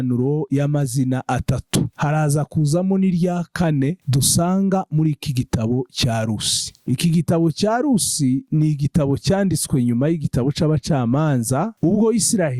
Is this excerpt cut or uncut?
uncut